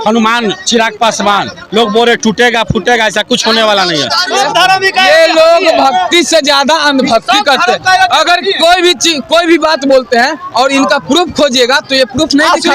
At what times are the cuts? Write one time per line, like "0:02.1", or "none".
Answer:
0:04.3